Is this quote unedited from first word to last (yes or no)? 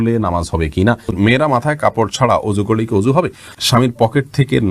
no